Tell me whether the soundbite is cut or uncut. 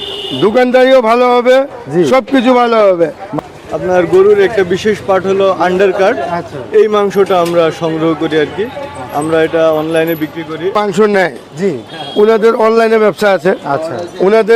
cut